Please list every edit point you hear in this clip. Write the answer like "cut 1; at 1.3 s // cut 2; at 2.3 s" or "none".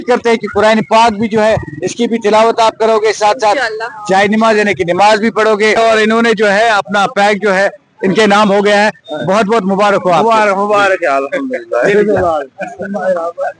cut 1; at 5.8 s